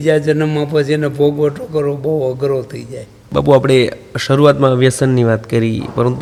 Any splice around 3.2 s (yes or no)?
no